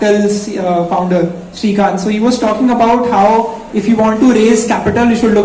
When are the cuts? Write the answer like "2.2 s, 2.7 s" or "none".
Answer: none